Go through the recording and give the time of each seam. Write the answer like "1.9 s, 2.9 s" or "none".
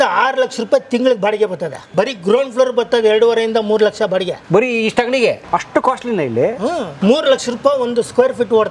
1.8 s, 4.4 s, 5.4 s, 6.9 s